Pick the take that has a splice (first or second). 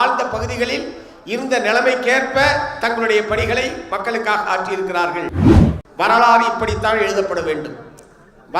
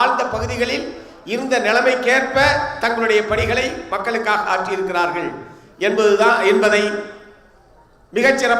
first